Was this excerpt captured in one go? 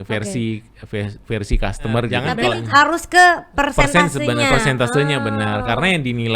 no; 1 cut; at 2.2 s

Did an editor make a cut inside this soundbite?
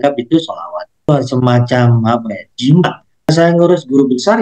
yes; 2 cuts; at 1.1 s, 3.3 s

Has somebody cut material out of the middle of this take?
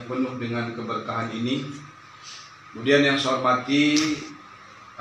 no; 0 cuts

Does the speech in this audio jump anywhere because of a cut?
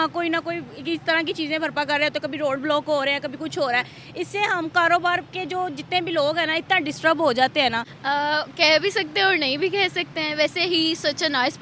yes; 1 cut; at 7.9 s

